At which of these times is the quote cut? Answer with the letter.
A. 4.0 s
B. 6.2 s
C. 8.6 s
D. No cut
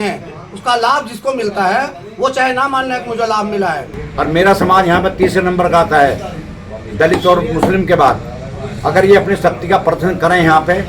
A